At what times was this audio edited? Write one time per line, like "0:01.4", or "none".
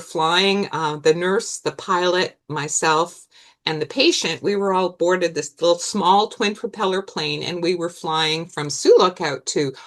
none